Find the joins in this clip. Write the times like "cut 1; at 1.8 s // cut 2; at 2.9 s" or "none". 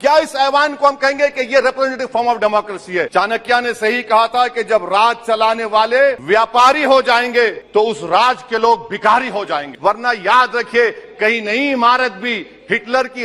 cut 1; at 3.1 s // cut 2; at 6.2 s // cut 3; at 7.6 s // cut 4; at 9.7 s